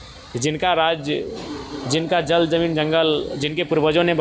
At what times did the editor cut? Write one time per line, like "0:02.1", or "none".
none

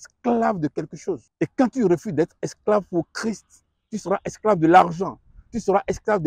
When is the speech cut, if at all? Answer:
0:01.3

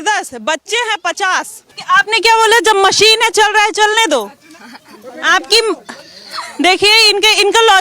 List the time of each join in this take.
0:01.6

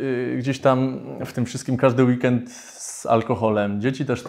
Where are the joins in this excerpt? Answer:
none

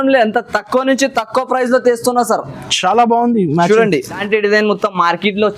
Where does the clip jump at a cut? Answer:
0:04.2

